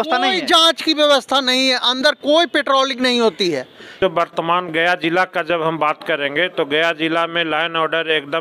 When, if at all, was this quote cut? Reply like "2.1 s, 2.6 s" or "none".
3.9 s